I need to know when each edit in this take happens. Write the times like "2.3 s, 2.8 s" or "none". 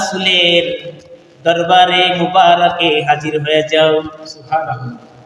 none